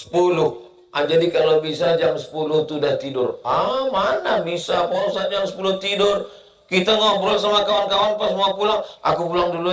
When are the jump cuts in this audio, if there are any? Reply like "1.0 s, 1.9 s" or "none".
none